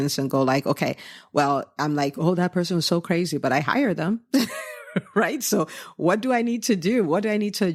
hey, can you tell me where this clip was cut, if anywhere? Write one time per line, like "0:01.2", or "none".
none